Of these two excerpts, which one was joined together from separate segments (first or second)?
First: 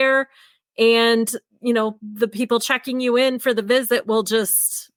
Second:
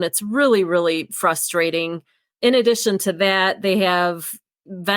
second